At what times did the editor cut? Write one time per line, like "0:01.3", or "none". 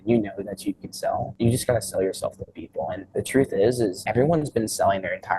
0:01.3
0:03.0
0:04.0